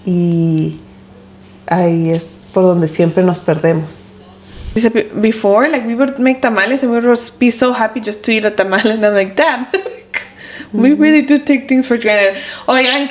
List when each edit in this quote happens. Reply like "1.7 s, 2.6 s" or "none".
4.8 s